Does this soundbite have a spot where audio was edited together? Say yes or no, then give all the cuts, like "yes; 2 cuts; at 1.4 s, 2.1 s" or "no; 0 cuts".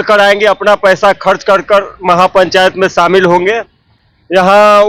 no; 0 cuts